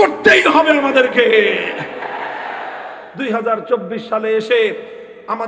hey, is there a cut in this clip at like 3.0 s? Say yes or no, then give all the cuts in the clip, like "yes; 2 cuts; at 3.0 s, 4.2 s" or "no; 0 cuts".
yes; 1 cut; at 3.0 s